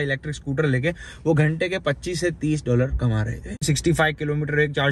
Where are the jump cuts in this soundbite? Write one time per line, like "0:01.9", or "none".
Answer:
0:03.6

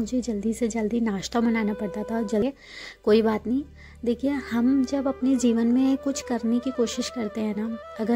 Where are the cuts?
0:02.4

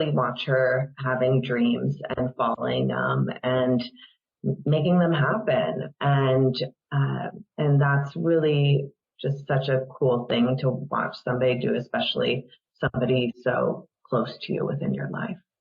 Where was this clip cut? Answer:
0:07.4

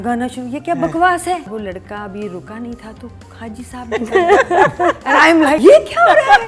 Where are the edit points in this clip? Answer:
0:01.5
0:05.6

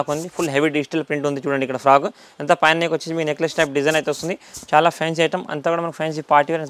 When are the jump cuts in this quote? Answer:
none

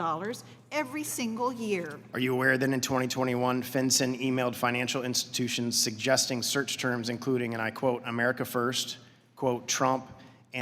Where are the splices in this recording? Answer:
0:02.0

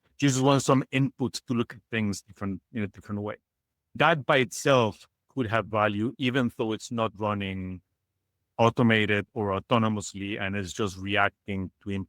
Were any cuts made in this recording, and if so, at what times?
0:04.0

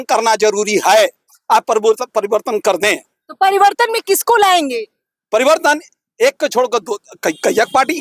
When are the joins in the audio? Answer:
none

